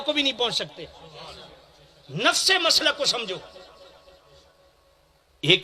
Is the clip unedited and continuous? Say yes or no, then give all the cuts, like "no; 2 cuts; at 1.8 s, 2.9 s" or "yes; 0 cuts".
yes; 0 cuts